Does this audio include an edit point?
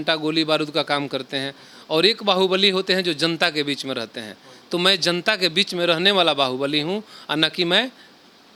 no; 0 cuts

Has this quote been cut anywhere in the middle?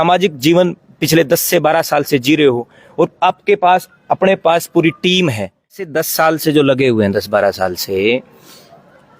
yes; 1 cut; at 5.9 s

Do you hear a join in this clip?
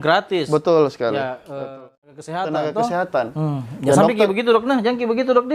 yes; 1 cut; at 1.7 s

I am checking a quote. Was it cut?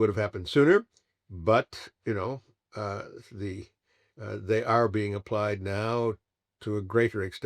no; 0 cuts

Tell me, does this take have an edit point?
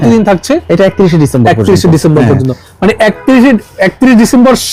no; 0 cuts

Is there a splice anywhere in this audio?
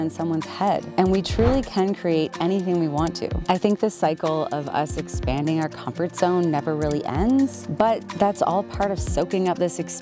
yes; 3 cuts; at 0.9 s, 3.3 s, 7.6 s

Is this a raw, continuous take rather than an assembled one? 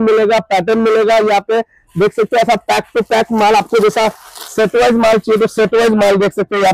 yes; 0 cuts

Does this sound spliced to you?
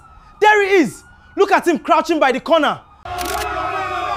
no; 0 cuts

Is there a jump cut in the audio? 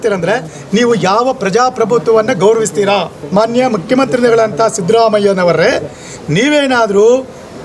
yes; 1 cut; at 3.2 s

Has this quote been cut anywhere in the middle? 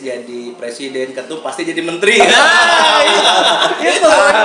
no; 0 cuts

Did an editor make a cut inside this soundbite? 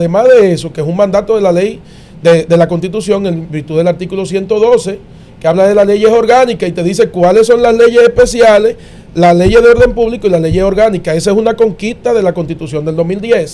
no; 0 cuts

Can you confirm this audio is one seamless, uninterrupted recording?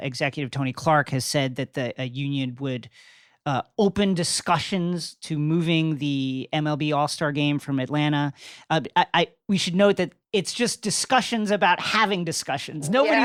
yes; 0 cuts

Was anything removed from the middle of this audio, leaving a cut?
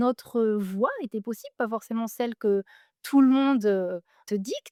no; 0 cuts

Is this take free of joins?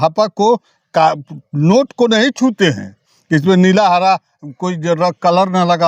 yes; 0 cuts

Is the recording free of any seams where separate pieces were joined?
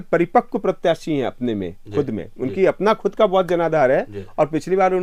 yes; 0 cuts

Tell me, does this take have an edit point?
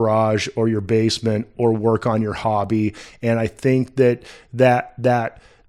no; 0 cuts

